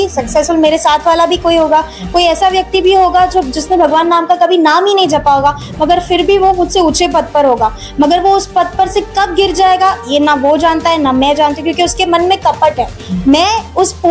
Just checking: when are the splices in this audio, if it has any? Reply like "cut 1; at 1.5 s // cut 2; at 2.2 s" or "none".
none